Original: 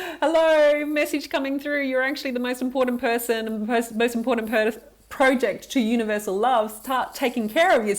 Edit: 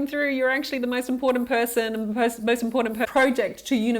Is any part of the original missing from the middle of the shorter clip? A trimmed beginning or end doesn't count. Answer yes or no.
yes